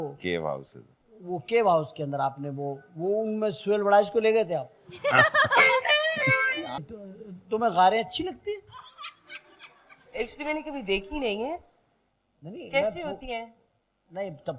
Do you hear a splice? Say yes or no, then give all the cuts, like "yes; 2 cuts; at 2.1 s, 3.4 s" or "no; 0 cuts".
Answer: yes; 1 cut; at 6.9 s